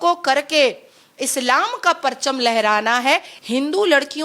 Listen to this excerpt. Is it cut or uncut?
cut